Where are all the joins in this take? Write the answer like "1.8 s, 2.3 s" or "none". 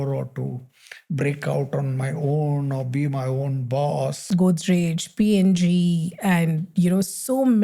4.2 s